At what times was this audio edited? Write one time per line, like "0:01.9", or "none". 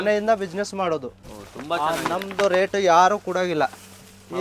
0:01.2